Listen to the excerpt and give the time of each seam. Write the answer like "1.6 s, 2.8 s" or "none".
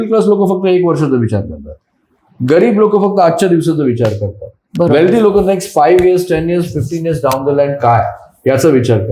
none